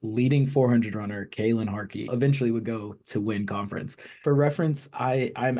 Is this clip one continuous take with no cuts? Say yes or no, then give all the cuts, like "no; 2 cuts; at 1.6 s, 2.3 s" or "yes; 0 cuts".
no; 2 cuts; at 2.1 s, 4.1 s